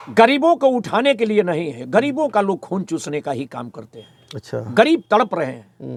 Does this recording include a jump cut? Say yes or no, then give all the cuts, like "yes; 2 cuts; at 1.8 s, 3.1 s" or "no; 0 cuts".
no; 0 cuts